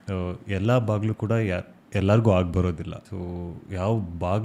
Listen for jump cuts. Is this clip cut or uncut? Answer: cut